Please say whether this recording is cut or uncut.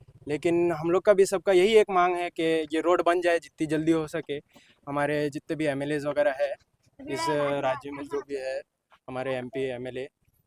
uncut